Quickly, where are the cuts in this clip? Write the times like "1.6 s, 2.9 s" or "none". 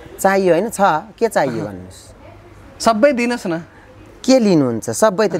none